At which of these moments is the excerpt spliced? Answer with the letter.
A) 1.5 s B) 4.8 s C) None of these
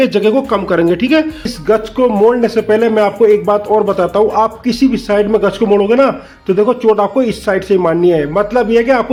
C